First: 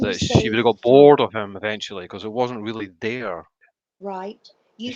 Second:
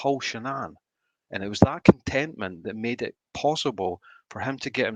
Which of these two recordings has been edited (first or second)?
first